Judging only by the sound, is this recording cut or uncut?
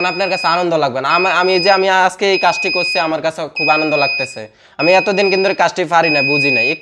uncut